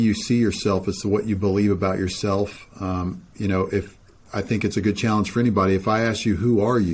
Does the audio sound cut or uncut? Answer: uncut